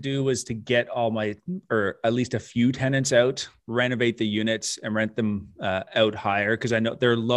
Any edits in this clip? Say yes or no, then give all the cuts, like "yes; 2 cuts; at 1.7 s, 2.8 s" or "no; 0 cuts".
no; 0 cuts